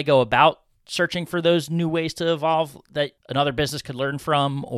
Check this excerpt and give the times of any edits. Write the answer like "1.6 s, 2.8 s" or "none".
3.2 s